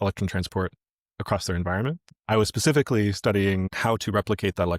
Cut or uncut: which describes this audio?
uncut